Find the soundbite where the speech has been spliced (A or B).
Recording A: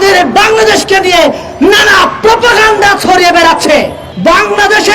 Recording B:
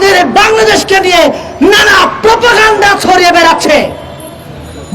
A